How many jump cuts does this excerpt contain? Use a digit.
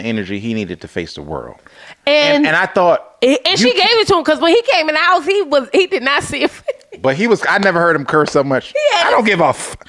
0